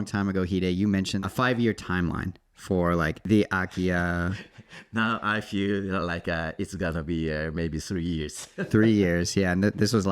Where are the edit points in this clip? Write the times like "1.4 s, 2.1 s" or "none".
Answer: 1.2 s, 3.2 s